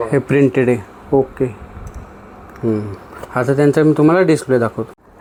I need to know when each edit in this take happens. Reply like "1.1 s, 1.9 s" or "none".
none